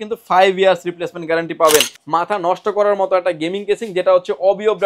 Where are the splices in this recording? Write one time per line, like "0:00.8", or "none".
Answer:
0:02.0